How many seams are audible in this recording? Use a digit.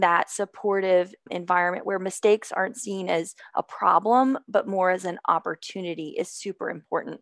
1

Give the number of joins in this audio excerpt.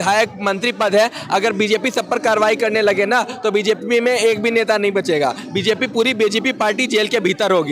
0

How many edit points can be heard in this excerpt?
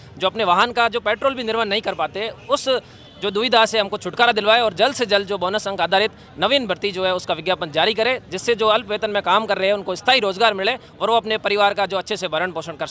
0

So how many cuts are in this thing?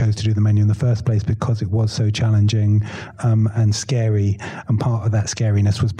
0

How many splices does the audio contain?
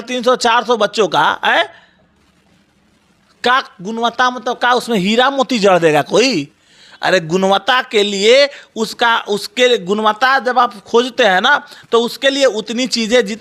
0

